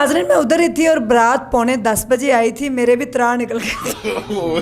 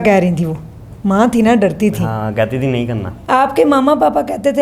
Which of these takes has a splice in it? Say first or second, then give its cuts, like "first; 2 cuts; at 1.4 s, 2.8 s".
second; 1 cut; at 3.1 s